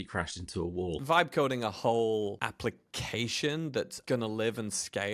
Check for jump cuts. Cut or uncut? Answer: cut